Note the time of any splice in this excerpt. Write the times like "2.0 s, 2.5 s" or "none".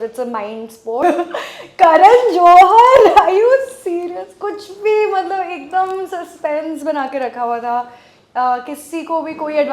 1.0 s